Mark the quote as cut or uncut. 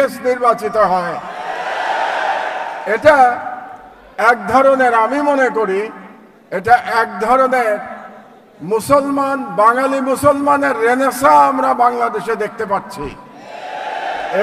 uncut